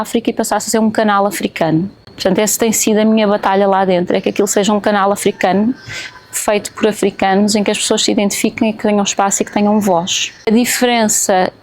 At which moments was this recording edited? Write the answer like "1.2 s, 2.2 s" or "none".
10.5 s